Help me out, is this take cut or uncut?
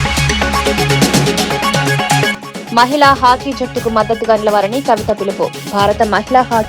cut